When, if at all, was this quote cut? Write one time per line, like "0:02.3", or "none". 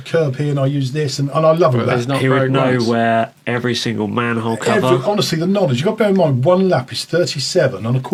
none